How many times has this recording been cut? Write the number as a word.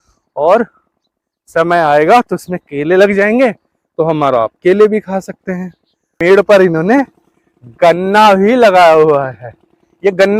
one